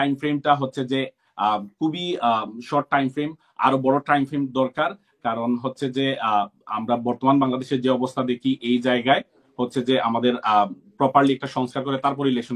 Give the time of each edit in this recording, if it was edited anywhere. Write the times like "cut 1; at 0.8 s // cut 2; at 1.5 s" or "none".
none

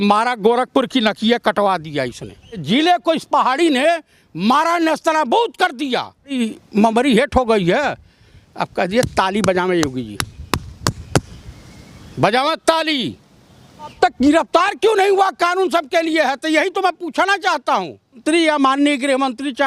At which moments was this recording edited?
cut 1; at 2.6 s // cut 2; at 6.2 s // cut 3; at 13.9 s // cut 4; at 18.2 s

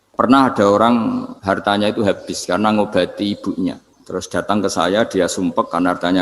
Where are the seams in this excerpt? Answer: cut 1; at 1.3 s // cut 2; at 3.9 s

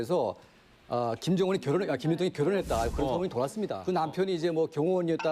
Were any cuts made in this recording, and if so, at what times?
cut 1; at 3.8 s

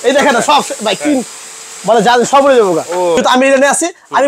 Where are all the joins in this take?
cut 1; at 3.2 s

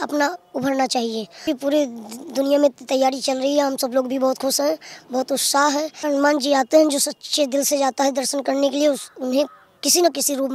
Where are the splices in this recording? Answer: cut 1; at 1.4 s // cut 2; at 6.0 s

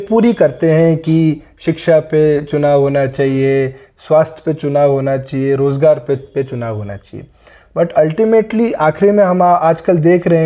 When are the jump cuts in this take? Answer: none

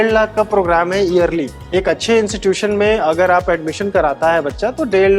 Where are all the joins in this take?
cut 1; at 1.6 s

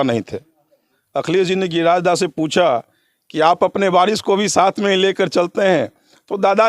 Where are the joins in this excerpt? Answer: cut 1; at 1.0 s

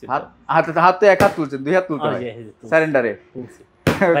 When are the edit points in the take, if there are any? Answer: none

